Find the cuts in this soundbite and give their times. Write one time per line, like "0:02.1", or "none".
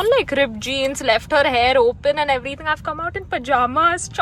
none